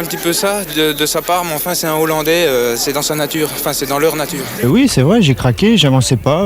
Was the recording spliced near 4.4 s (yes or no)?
yes